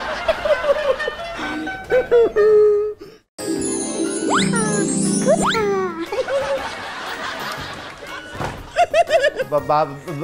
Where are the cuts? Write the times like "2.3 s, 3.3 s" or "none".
3.3 s